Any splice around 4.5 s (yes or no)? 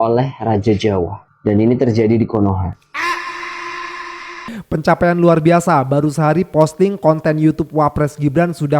yes